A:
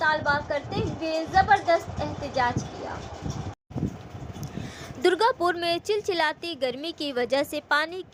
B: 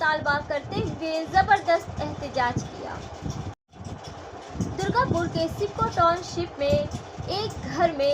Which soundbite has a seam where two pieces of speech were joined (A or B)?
B